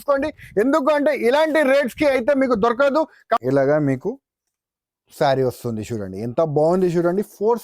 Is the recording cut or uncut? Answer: cut